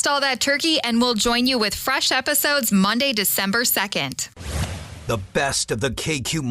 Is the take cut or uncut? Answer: cut